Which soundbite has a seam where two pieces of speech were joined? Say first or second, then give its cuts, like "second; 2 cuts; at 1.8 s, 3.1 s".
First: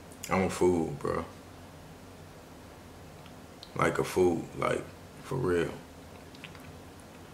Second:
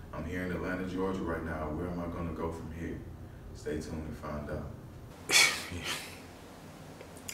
second; 1 cut; at 4.8 s